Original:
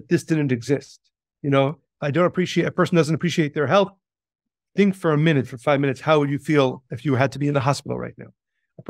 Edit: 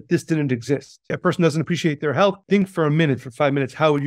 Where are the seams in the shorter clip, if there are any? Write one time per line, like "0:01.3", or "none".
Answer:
0:01.2
0:02.4